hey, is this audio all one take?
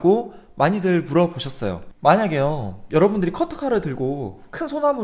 no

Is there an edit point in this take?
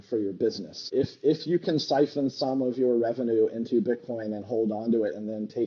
no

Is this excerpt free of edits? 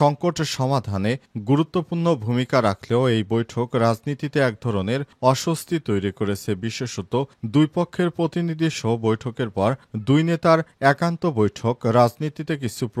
yes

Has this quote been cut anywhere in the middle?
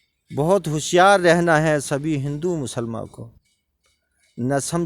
no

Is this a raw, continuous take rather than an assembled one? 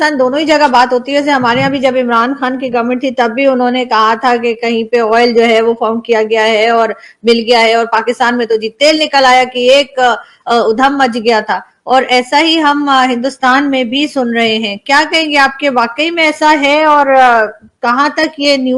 yes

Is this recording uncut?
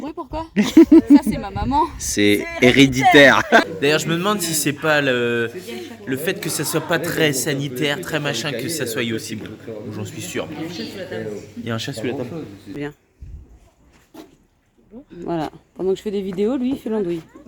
no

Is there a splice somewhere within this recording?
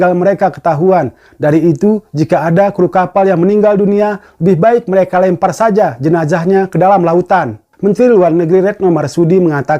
yes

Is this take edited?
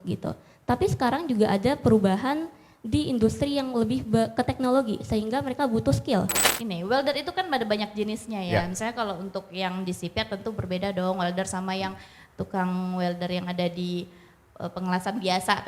yes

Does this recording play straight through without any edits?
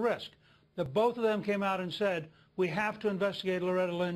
yes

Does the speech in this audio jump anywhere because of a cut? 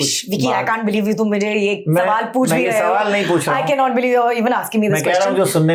no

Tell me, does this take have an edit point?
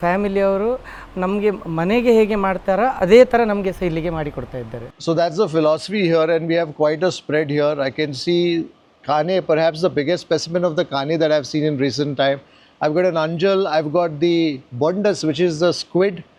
no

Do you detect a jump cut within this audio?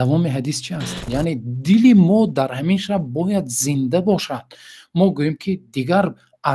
yes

